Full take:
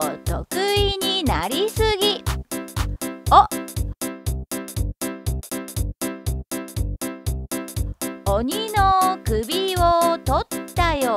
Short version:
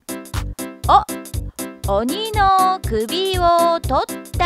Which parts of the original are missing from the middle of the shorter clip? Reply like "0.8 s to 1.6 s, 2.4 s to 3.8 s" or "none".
4.2 s to 8.2 s